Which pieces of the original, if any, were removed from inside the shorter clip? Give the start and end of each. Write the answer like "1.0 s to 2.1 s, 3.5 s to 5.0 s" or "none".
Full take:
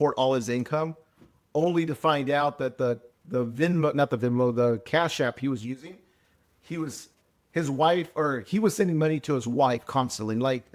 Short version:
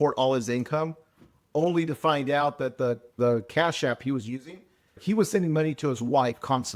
3.2 s to 4.5 s, 6.3 s to 8.4 s